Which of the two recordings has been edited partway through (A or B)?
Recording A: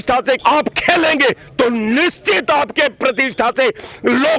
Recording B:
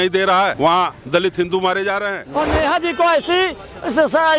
B